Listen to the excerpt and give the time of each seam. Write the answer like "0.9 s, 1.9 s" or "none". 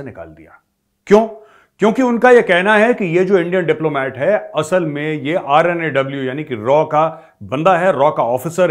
none